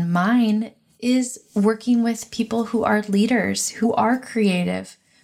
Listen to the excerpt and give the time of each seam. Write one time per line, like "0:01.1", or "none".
0:03.9